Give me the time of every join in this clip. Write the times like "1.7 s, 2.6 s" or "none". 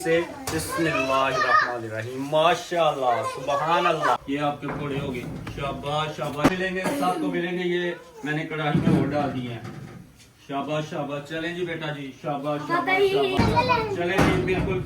4.2 s, 6.5 s, 13.4 s